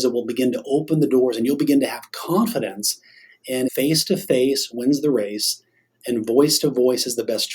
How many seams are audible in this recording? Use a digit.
1